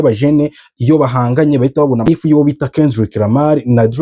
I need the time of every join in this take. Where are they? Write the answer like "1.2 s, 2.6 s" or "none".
2.2 s